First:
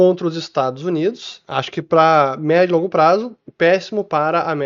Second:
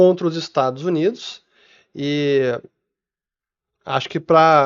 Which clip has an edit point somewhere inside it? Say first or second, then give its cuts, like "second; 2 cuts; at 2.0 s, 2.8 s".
first; 1 cut; at 1.3 s